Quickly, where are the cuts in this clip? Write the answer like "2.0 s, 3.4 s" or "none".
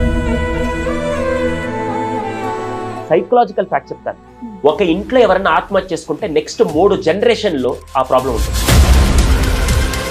3.0 s